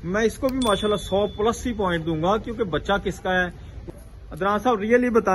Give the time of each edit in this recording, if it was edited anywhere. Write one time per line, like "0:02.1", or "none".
0:03.7